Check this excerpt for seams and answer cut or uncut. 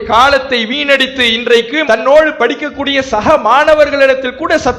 uncut